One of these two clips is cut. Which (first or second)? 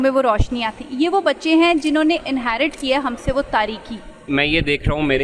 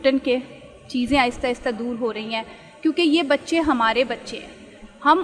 first